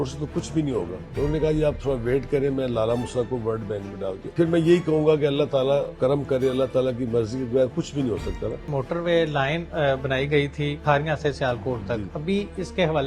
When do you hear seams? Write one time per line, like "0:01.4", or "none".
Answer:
0:01.0
0:04.2
0:05.9
0:08.7
0:10.8
0:12.1